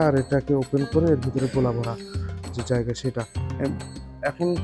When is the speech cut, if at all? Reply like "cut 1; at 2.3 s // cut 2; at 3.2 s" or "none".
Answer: cut 1; at 3.6 s